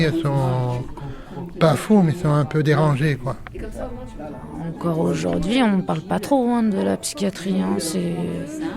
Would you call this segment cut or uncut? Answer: cut